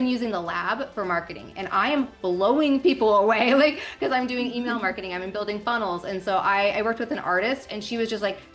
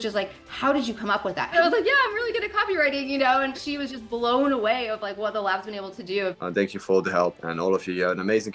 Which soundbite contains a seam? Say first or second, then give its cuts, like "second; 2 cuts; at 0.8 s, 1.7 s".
second; 4 cuts; at 1.5 s, 3.6 s, 6.3 s, 7.4 s